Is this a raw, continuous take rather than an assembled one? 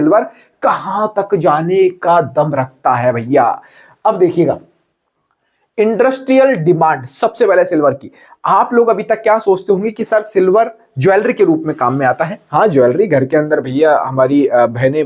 yes; 0 cuts

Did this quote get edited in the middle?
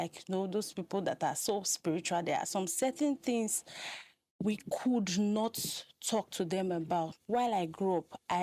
yes; 1 cut; at 7.2 s

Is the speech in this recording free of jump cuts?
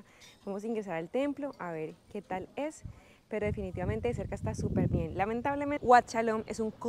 no; 1 cut; at 5.8 s

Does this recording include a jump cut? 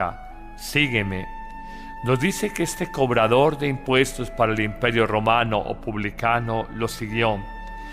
yes; 1 cut; at 3.6 s

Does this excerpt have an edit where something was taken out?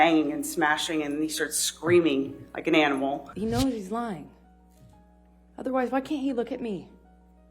yes; 1 cut; at 3.3 s

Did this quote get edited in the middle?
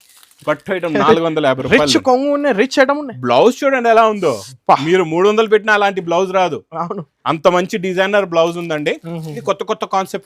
yes; 1 cut; at 9.3 s

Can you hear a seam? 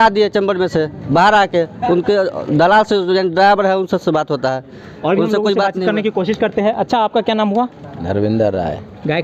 no; 0 cuts

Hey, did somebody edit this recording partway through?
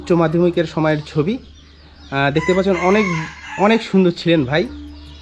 no; 0 cuts

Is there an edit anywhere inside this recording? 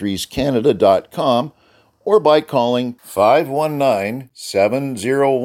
no; 0 cuts

